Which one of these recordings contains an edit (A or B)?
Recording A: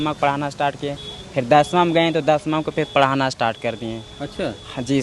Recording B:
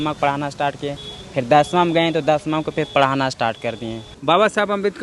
B